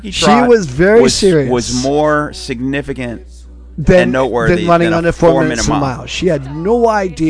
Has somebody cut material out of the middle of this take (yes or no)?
no